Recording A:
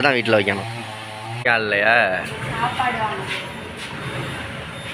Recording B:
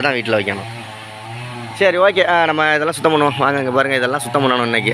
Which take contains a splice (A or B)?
A